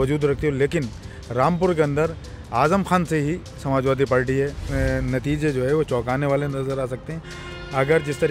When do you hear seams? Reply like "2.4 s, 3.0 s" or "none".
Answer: 4.7 s